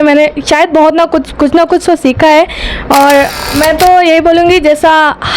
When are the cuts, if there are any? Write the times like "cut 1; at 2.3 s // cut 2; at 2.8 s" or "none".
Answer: cut 1; at 3.4 s